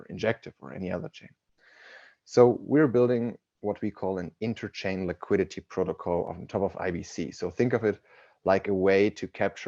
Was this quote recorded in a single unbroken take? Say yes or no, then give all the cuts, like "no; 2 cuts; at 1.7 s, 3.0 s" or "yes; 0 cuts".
no; 1 cut; at 6.3 s